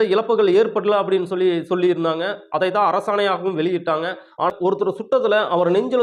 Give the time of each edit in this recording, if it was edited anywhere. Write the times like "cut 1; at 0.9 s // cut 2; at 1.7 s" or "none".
cut 1; at 4.5 s